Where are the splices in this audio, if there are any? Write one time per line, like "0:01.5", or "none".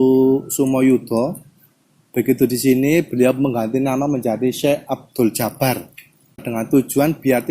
0:06.5

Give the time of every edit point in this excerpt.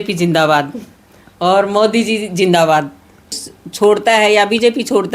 0:03.1

